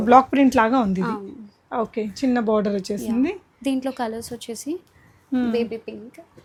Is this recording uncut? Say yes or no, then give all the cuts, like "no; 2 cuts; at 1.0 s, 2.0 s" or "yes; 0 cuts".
yes; 0 cuts